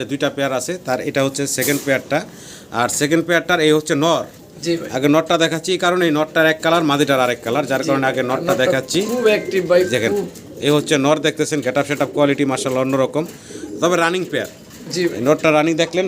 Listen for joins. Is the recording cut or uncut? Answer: uncut